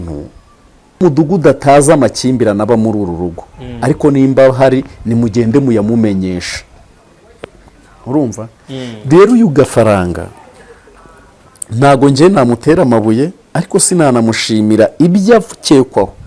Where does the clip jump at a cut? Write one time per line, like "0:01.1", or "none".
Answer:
0:01.0